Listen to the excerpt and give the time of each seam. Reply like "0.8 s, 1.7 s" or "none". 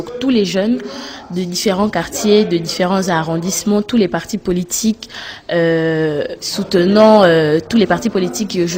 4.2 s